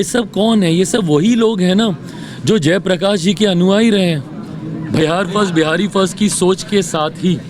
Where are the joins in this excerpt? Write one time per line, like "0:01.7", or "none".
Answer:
0:05.0